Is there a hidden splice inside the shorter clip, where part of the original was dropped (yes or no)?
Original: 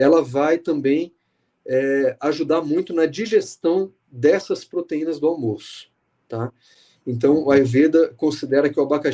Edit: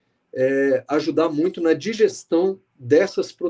no